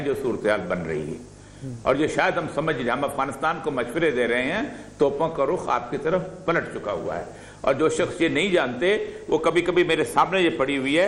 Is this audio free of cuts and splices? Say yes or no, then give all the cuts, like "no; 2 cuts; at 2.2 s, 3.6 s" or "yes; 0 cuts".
yes; 0 cuts